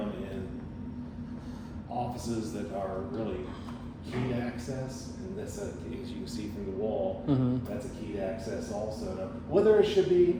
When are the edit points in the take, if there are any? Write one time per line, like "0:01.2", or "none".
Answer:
none